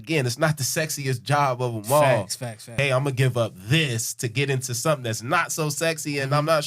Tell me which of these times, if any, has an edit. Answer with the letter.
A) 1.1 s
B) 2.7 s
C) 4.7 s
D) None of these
B